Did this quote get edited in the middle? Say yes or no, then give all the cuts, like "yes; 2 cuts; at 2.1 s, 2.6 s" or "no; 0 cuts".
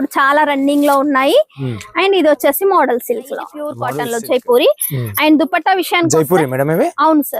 yes; 1 cut; at 3.7 s